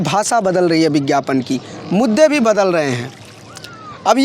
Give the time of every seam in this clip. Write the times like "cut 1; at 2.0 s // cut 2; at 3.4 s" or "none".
none